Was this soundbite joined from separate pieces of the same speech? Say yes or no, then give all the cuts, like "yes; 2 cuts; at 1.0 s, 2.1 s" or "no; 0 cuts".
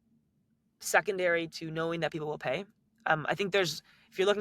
no; 0 cuts